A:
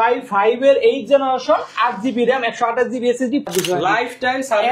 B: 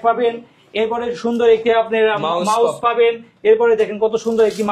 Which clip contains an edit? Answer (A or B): A